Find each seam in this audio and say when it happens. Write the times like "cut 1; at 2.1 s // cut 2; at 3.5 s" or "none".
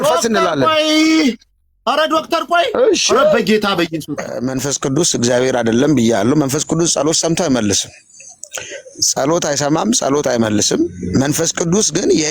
cut 1; at 4.4 s